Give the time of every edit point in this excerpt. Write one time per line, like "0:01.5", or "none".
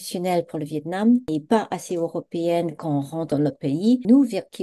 0:03.4